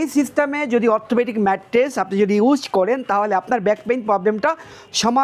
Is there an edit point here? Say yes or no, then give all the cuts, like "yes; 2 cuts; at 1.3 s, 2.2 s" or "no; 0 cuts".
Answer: no; 0 cuts